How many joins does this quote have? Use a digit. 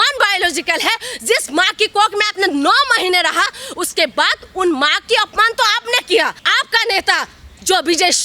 1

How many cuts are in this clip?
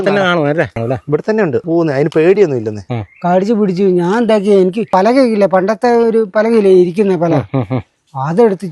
4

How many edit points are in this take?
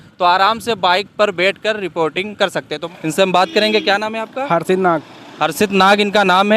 1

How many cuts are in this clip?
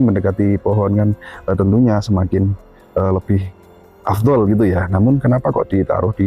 0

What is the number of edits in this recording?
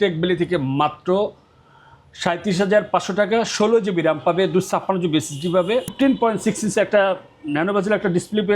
1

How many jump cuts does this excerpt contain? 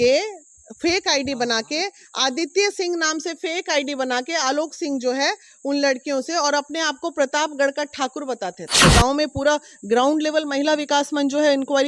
1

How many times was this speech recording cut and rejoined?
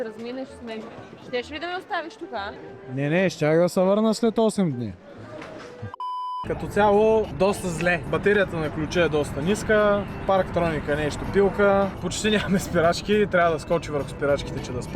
3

